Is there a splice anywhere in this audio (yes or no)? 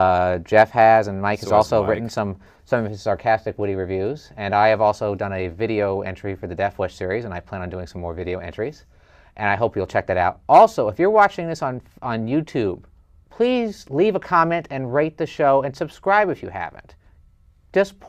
yes